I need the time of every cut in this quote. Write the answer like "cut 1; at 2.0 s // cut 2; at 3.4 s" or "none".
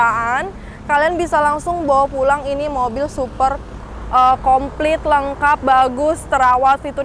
none